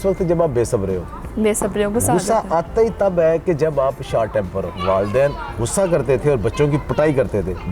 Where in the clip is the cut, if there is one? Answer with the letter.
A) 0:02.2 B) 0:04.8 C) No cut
B